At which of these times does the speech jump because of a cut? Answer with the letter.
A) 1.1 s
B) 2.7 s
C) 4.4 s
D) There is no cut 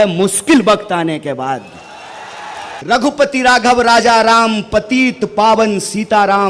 B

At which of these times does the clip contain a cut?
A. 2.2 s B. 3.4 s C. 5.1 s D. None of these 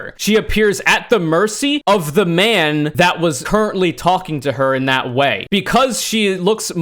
B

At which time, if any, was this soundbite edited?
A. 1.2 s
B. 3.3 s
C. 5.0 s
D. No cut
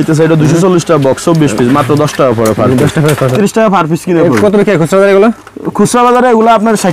B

